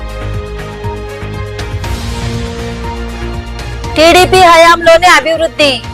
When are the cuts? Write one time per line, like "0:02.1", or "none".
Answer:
0:01.7